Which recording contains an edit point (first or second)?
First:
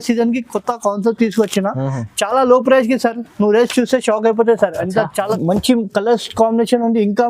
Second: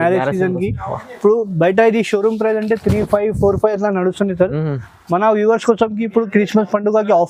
first